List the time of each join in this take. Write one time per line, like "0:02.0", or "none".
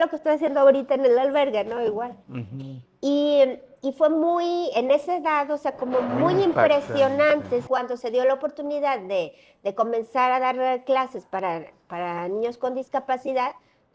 0:07.7